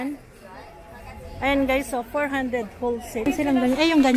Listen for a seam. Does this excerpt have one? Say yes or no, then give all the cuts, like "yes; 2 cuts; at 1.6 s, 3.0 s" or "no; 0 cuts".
yes; 1 cut; at 3.3 s